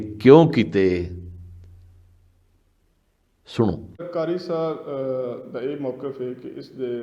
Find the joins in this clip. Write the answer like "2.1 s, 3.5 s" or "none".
4.1 s